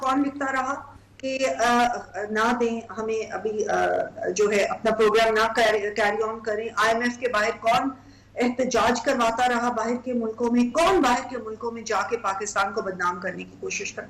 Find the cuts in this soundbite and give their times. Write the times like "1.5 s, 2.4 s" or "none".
none